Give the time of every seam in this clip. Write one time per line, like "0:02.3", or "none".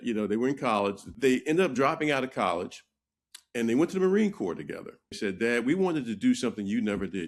0:01.1
0:05.2